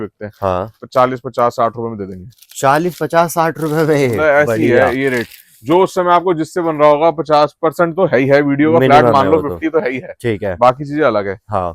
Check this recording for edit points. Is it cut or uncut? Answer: uncut